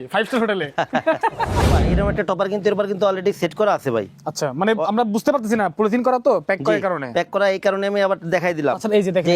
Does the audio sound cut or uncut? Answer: cut